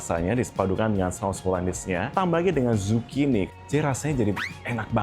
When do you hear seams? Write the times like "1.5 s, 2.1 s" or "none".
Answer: 2.1 s, 3.5 s

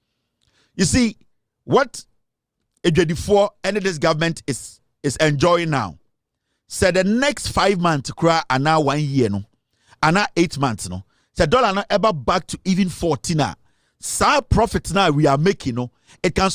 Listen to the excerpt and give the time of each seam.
none

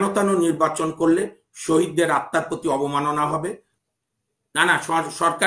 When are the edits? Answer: none

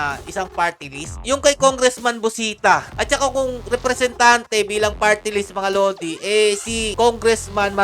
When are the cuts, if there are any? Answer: 2.9 s

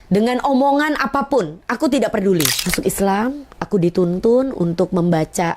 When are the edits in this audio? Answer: 2.6 s

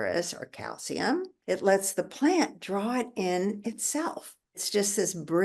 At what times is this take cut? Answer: 1.3 s, 4.6 s

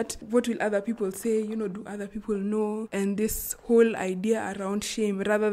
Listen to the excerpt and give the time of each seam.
2.9 s

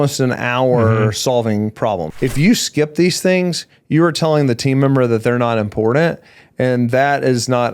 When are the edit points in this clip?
2.1 s

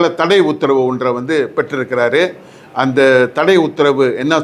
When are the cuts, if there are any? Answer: none

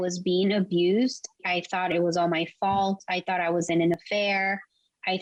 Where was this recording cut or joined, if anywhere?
none

